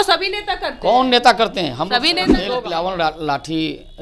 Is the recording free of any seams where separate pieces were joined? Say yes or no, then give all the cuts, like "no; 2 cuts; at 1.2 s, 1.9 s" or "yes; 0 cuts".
no; 1 cut; at 2.3 s